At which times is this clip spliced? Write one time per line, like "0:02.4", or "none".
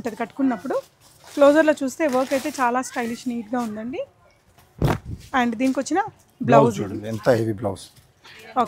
none